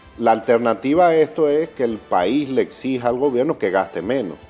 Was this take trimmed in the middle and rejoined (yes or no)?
no